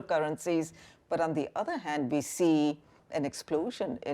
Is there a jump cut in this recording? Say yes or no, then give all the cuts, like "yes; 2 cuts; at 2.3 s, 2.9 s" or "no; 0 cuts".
yes; 1 cut; at 3.0 s